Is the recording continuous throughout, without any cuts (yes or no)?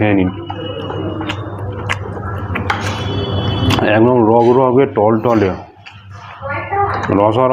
yes